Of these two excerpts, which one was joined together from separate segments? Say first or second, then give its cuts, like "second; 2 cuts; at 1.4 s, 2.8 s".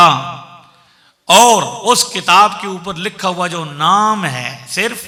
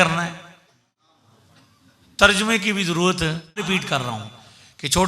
second; 1 cut; at 3.7 s